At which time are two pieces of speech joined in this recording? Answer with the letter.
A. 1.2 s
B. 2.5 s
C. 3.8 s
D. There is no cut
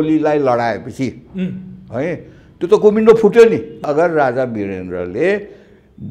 C